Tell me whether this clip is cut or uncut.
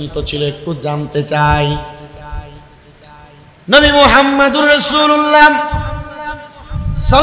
uncut